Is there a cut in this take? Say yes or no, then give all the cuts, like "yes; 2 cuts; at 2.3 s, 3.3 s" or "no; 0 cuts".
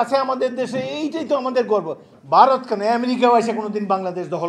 no; 0 cuts